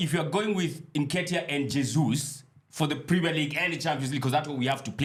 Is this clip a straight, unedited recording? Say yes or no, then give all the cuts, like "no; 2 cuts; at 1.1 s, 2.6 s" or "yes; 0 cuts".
yes; 0 cuts